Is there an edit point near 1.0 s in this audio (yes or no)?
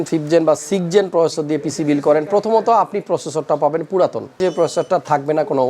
no